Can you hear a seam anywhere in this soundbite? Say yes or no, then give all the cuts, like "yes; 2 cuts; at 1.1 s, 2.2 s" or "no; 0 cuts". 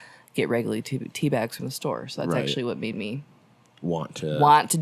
no; 0 cuts